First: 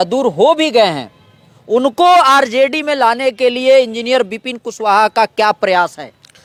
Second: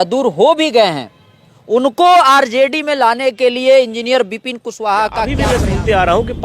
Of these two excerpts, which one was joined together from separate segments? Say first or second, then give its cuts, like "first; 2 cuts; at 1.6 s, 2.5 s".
second; 1 cut; at 5.4 s